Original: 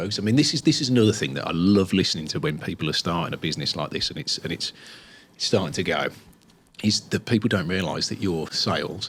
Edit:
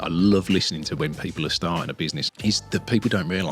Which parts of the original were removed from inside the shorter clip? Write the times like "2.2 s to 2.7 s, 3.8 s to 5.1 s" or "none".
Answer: 3.7 s to 6.6 s